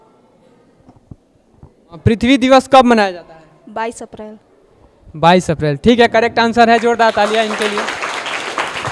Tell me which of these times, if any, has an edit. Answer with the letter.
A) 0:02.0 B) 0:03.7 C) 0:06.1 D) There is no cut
A